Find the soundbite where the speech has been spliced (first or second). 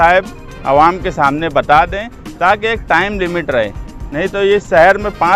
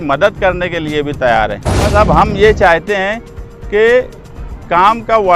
second